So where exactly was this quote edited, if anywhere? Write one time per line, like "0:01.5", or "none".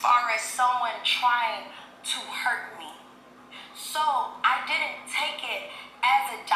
none